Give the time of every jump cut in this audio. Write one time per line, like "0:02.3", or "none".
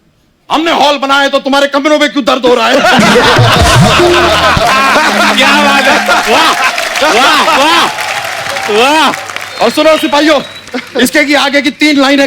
none